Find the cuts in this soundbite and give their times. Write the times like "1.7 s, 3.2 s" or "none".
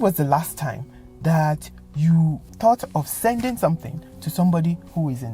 none